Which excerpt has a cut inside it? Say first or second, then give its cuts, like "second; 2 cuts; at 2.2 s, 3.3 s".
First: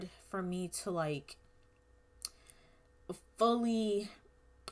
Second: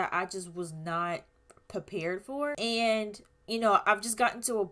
second; 1 cut; at 2.6 s